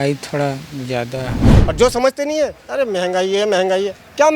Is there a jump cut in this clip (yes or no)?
yes